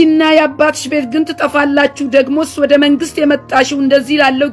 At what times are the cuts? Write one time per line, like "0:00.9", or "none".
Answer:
none